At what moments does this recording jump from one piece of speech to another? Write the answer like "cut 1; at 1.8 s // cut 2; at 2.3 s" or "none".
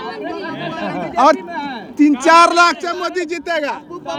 none